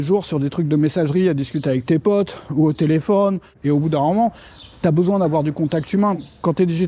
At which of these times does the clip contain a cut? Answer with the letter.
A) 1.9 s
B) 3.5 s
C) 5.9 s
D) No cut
B